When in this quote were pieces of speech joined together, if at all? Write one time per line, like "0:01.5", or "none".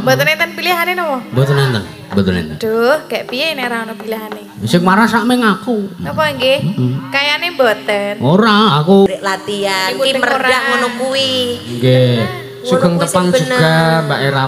0:09.1